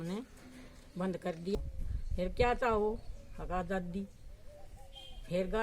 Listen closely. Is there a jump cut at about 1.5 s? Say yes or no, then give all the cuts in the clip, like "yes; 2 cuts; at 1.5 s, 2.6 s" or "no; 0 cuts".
yes; 1 cut; at 1.5 s